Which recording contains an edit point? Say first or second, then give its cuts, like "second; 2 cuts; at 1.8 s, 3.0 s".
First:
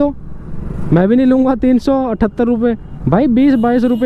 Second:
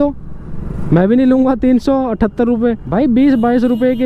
second; 1 cut; at 2.8 s